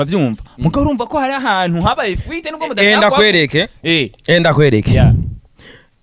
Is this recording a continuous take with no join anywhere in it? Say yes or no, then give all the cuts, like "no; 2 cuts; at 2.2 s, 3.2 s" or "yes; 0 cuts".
yes; 0 cuts